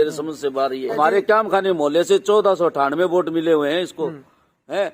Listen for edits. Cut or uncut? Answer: cut